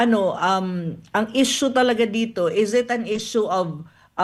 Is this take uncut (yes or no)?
yes